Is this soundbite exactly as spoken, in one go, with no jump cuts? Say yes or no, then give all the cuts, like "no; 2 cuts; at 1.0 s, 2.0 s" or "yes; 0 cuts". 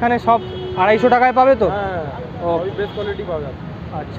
yes; 0 cuts